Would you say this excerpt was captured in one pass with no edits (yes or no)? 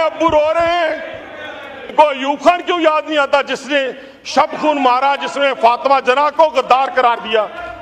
no